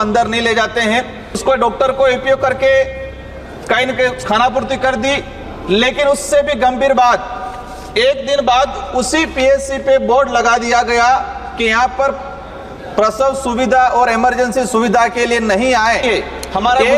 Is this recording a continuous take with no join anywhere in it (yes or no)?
no